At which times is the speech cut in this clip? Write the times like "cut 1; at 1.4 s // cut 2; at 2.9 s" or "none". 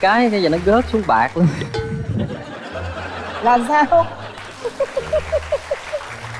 cut 1; at 1.6 s